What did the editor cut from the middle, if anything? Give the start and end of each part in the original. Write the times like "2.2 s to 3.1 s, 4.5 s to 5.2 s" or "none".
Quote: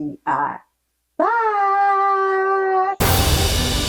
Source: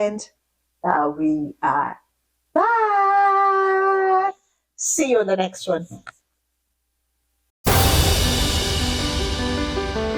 4.3 s to 7.6 s